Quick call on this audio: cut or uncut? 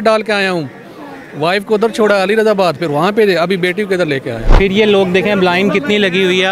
cut